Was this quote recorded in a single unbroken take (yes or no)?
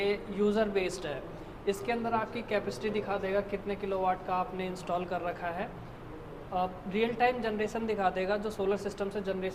yes